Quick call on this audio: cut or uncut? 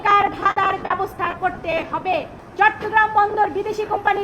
cut